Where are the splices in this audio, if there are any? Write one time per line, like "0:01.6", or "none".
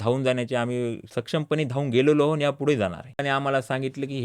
0:03.2

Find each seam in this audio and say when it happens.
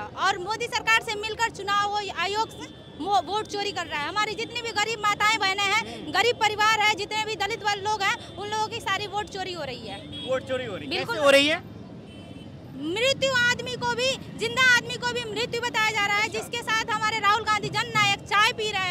none

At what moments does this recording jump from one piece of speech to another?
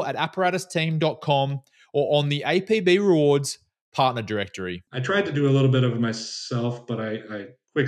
0:04.8

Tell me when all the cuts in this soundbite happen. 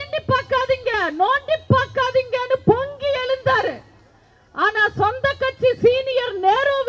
none

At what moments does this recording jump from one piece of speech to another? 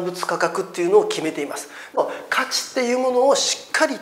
0:02.0

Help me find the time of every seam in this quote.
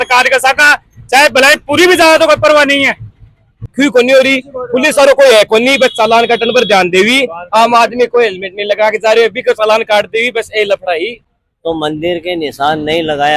0:03.6
0:11.2

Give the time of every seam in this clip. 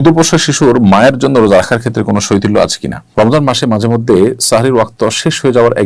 0:03.0

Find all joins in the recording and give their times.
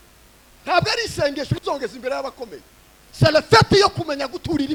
none

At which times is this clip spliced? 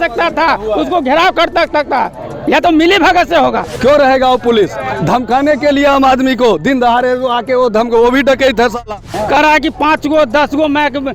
0:03.7
0:09.1

